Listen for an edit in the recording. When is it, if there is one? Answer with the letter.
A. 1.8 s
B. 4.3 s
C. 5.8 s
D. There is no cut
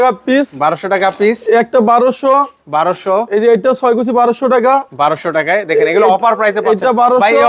D